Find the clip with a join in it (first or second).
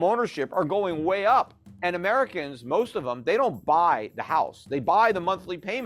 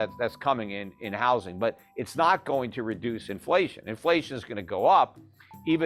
first